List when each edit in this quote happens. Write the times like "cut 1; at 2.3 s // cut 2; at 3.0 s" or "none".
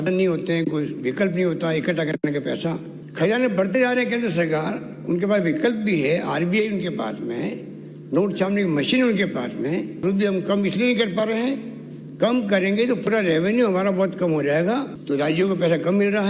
cut 1; at 3.0 s // cut 2; at 10.0 s // cut 3; at 14.9 s